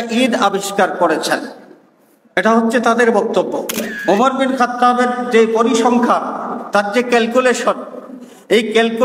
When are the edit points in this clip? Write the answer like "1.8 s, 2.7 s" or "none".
3.8 s

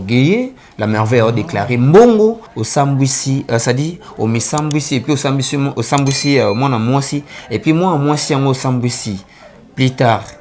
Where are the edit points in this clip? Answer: 2.5 s

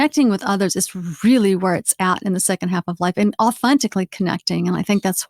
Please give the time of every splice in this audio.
3.6 s

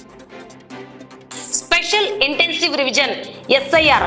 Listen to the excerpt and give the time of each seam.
1.7 s

